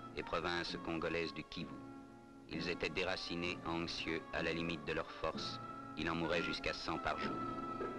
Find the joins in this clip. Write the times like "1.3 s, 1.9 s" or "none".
none